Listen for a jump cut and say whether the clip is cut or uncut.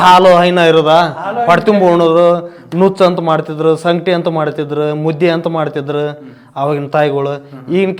uncut